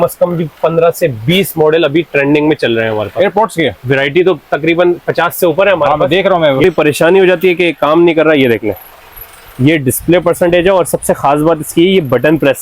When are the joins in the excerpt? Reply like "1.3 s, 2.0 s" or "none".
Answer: 6.6 s